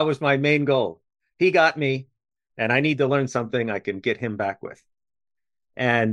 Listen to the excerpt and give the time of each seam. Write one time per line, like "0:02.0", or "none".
none